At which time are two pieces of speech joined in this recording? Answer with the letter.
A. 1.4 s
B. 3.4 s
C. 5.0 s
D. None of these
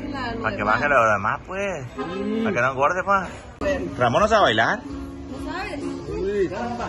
B